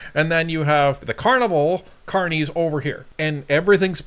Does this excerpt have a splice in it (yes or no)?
yes